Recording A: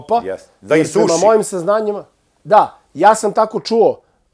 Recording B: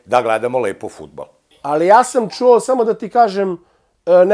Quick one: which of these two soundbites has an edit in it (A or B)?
B